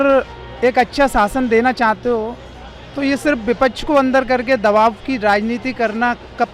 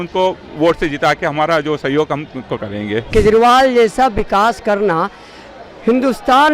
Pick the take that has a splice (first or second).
second